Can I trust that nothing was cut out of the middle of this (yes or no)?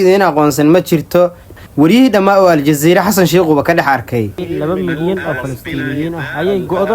no